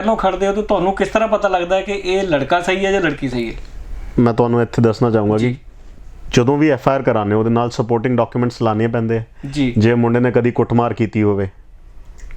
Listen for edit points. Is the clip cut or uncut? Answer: uncut